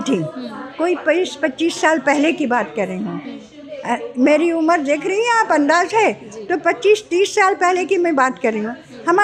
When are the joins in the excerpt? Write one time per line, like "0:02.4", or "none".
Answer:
none